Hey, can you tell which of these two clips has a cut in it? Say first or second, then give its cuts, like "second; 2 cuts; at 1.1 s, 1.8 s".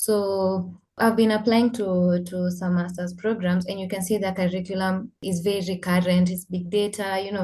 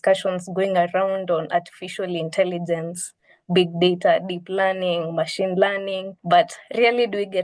first; 2 cuts; at 0.9 s, 5.2 s